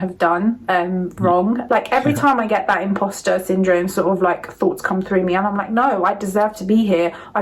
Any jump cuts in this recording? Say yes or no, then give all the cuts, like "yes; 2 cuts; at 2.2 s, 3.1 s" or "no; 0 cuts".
yes; 1 cut; at 1.6 s